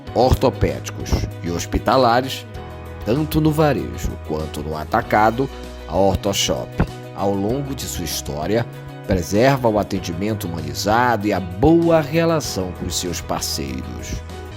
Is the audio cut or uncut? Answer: uncut